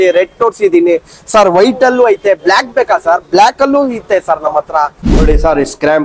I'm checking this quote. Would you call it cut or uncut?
cut